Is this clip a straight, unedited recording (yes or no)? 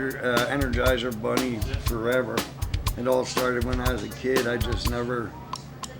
yes